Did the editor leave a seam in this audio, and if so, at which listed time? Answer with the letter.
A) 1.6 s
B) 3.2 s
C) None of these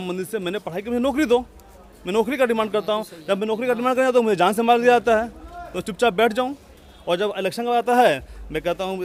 C